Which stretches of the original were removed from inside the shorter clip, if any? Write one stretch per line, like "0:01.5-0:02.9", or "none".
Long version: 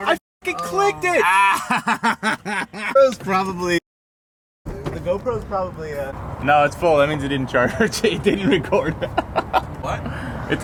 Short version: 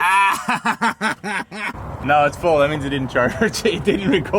0:02.9-0:06.1